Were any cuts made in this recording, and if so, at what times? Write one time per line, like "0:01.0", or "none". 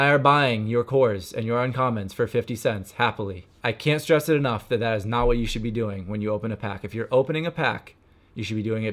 0:03.5